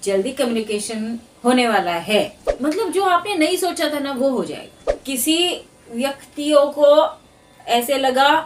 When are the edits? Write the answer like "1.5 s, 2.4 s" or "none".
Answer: 2.4 s, 5.0 s